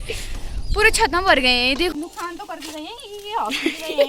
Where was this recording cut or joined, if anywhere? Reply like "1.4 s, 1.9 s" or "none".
1.9 s